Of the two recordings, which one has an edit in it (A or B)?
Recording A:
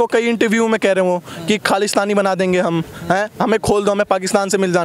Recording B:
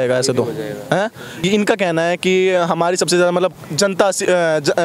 B